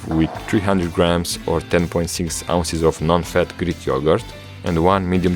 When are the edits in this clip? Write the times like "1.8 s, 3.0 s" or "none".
none